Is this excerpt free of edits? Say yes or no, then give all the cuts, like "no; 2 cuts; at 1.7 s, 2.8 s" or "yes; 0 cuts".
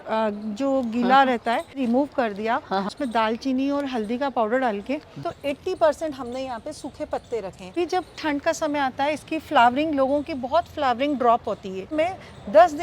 no; 4 cuts; at 2.9 s, 5.2 s, 7.7 s, 11.9 s